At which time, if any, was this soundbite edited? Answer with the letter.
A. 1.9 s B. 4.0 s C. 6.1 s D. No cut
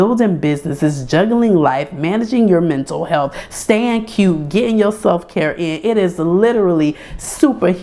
D